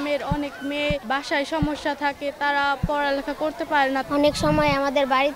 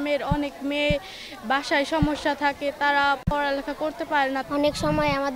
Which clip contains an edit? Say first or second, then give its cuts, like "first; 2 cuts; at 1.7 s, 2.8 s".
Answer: first; 1 cut; at 1.0 s